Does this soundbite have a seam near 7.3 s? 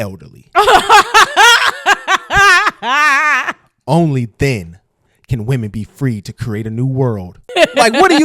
yes; 1 cut; at 7.3 s

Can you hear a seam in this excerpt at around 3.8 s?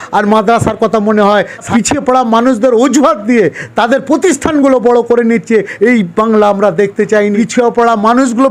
no; 2 cuts; at 1.7 s, 7.3 s

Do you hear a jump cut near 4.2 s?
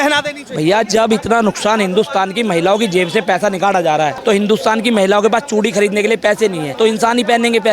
yes; 2 cuts; at 4.2 s, 6.6 s

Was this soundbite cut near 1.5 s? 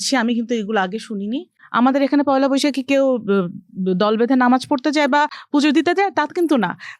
yes; 1 cut; at 1.5 s

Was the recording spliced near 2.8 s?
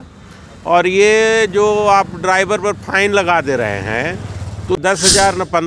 no; 1 cut; at 4.8 s

